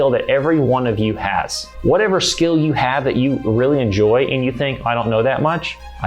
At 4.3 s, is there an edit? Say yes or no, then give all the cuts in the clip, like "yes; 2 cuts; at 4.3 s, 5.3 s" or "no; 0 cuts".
no; 1 cut; at 1.7 s